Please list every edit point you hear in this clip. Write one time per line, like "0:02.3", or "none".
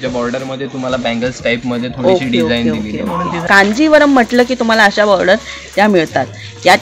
0:03.4